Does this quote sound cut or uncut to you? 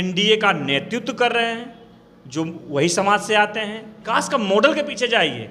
cut